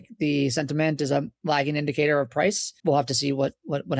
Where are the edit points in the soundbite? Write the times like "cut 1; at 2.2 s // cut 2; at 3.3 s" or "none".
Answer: cut 1; at 2.7 s